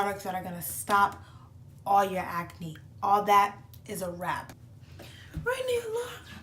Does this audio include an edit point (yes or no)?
yes